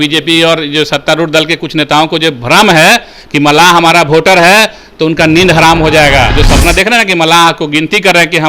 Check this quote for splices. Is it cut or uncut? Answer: cut